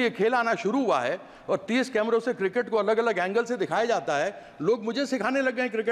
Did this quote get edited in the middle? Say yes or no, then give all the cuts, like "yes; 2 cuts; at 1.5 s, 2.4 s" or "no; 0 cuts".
no; 0 cuts